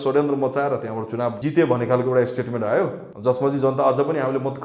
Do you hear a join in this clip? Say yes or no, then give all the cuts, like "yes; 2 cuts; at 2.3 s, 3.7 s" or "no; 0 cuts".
yes; 2 cuts; at 1.4 s, 3.1 s